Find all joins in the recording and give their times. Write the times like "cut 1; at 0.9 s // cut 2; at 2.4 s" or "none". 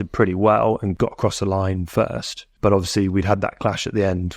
cut 1; at 0.9 s // cut 2; at 2.4 s

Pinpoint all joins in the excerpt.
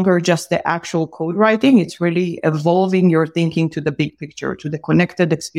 none

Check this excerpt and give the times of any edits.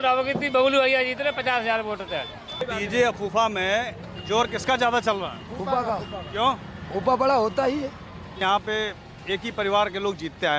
cut 1; at 2.4 s // cut 2; at 8.3 s

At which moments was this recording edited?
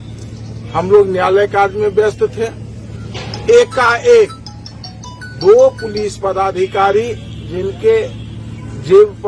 none

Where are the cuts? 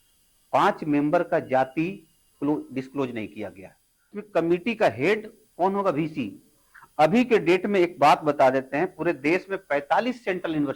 cut 1; at 4.1 s

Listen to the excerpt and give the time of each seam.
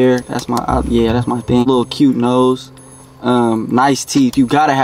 cut 1; at 1.7 s

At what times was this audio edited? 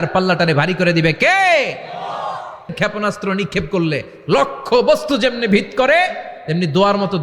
cut 1; at 2.7 s

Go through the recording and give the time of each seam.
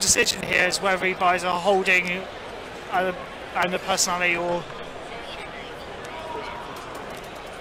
none

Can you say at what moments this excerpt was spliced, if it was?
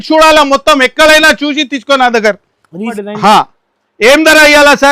cut 1; at 3.0 s

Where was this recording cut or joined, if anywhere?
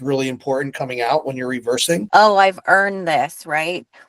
cut 1; at 2.0 s

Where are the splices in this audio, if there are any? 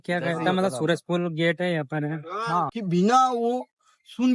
cut 1; at 2.7 s

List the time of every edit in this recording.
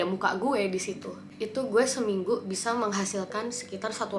cut 1; at 1.3 s

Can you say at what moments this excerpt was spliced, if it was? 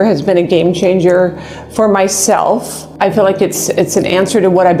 cut 1; at 2.8 s

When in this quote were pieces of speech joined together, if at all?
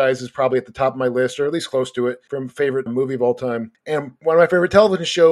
cut 1; at 2.6 s // cut 2; at 3.9 s

